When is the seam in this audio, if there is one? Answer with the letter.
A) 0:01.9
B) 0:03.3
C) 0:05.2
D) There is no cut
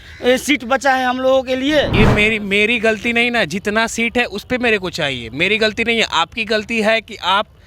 A